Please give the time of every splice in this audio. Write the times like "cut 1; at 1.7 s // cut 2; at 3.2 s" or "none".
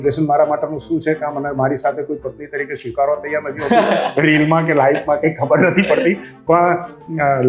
none

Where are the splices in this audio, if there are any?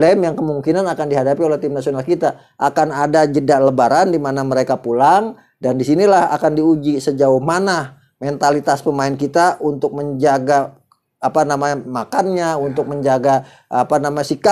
none

